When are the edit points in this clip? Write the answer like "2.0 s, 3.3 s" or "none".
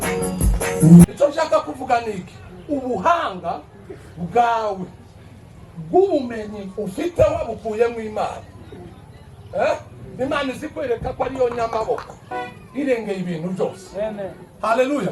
1.0 s